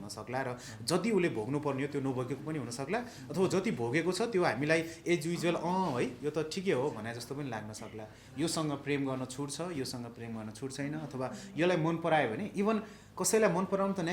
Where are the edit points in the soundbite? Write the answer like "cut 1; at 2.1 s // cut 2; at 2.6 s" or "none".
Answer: cut 1; at 8.2 s